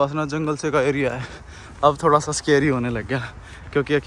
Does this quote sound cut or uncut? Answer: uncut